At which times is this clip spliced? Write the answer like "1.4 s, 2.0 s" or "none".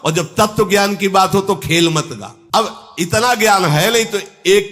none